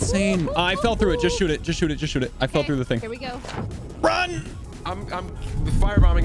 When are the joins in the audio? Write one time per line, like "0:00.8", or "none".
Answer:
none